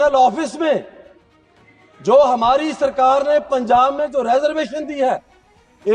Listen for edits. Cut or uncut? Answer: uncut